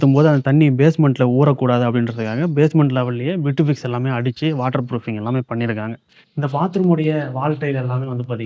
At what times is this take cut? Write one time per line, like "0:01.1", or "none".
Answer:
0:06.0